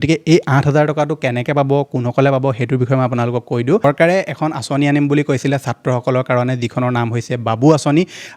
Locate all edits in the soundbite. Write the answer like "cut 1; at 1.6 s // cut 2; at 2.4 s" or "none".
cut 1; at 3.8 s